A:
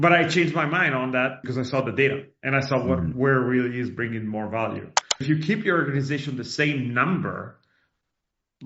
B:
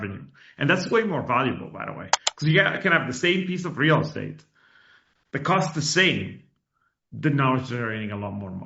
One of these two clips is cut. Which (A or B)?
A